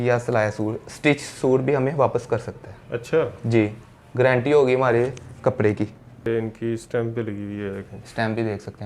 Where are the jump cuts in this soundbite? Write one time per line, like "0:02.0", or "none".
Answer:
0:06.3